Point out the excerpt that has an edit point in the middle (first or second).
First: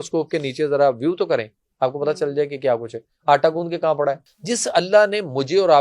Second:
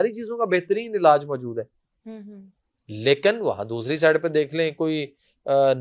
first